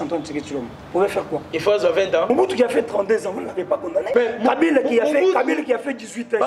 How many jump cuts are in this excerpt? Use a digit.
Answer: 2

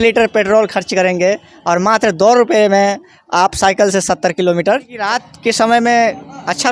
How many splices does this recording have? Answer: 1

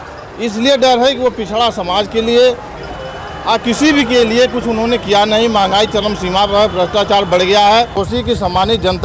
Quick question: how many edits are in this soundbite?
1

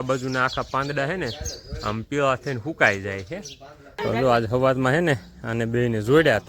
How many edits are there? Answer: 1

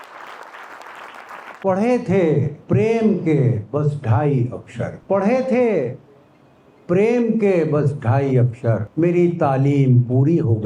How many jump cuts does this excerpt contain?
4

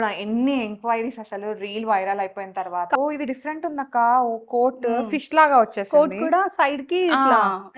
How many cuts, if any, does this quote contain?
1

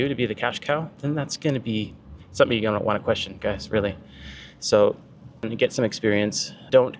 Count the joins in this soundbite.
0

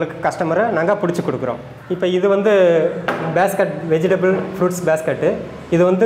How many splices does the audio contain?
1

